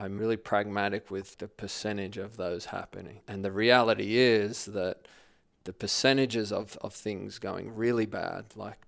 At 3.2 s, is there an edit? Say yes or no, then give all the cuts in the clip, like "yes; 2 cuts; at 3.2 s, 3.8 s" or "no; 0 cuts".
yes; 2 cuts; at 1.4 s, 3.2 s